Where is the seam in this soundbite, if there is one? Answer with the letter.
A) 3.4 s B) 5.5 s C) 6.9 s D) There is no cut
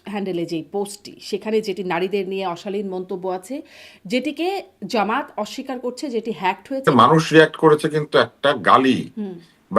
C